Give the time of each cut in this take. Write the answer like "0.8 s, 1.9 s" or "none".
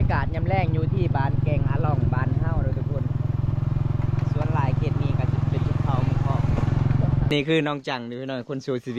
7.3 s

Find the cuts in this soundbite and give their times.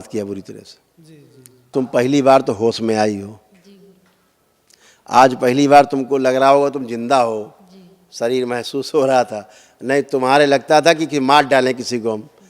1.7 s

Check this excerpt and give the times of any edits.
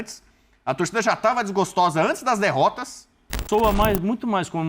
3.4 s

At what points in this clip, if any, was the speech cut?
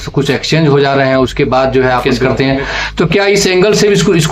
2.1 s

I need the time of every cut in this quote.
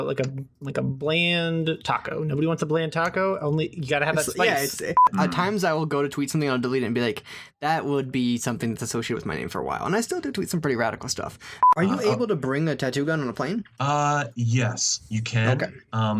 5.1 s, 11.5 s

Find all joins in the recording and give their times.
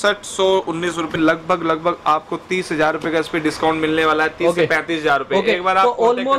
1.1 s

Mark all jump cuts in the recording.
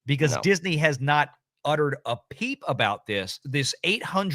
3.4 s

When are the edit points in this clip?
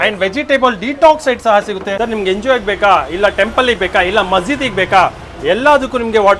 1.9 s

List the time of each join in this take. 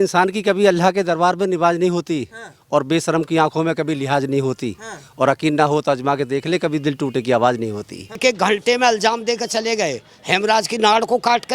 8.2 s

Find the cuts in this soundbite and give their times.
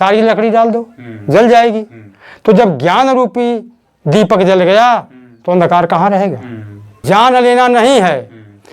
7.0 s

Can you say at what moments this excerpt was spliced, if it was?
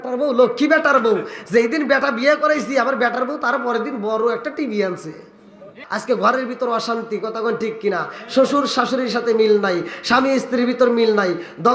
5.8 s

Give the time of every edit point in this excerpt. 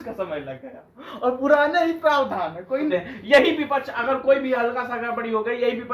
2.9 s

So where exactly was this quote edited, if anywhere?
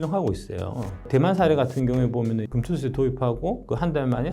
1.0 s, 2.5 s

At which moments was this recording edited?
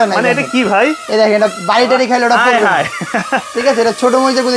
none

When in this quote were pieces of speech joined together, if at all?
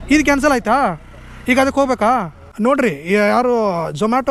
2.4 s

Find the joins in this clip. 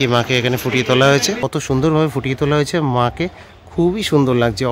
1.8 s

